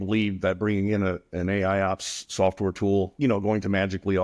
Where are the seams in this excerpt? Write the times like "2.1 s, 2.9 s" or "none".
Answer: 3.1 s